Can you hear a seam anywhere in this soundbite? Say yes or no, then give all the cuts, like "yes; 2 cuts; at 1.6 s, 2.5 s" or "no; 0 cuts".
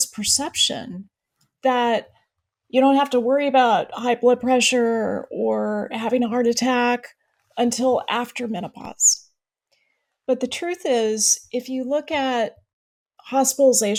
no; 0 cuts